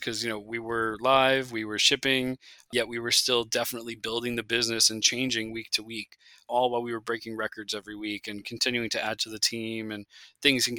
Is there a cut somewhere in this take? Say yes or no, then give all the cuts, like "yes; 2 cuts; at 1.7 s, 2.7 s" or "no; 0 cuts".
yes; 2 cuts; at 2.7 s, 6.5 s